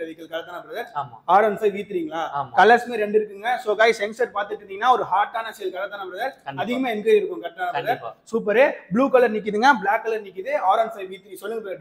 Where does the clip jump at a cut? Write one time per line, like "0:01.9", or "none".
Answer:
none